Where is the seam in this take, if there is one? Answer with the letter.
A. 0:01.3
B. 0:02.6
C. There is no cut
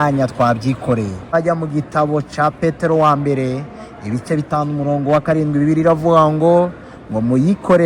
A